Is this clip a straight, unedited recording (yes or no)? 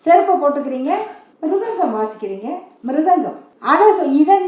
no